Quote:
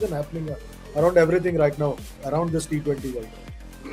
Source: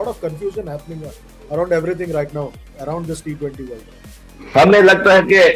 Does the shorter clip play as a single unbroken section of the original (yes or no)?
yes